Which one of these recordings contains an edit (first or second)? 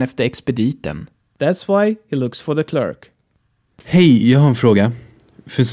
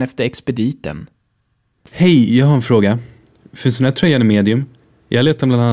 second